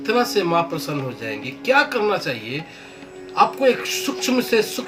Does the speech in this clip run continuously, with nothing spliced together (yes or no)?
yes